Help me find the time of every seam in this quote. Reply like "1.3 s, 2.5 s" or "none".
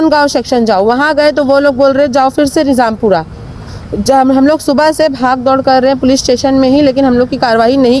none

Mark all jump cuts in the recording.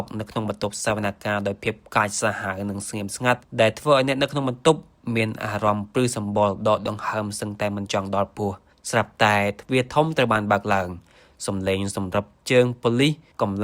none

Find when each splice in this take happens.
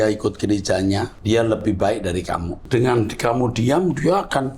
1.1 s, 2.6 s

